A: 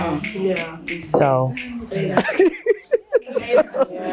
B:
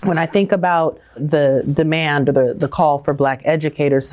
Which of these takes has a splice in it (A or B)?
B